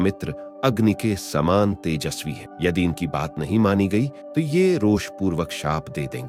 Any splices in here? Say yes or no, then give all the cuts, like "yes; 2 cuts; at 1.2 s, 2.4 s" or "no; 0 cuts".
no; 0 cuts